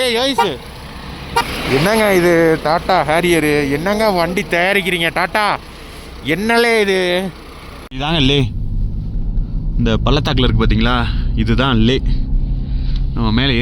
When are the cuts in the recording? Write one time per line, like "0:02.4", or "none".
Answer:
0:01.5
0:07.8